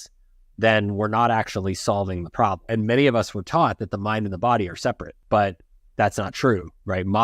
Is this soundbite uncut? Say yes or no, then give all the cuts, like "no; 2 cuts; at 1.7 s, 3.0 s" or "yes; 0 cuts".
no; 2 cuts; at 2.6 s, 5.1 s